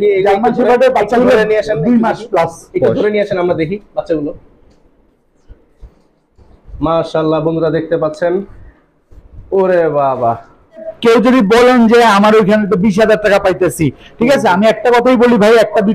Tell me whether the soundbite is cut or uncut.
cut